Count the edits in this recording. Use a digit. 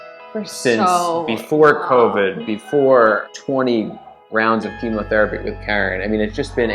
2